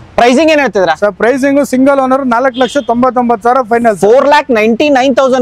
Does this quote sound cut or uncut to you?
uncut